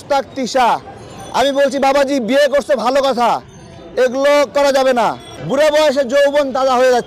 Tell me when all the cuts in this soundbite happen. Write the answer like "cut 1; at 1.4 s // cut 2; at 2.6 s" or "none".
cut 1; at 5.4 s